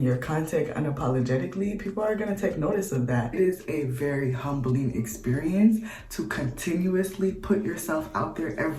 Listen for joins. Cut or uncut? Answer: cut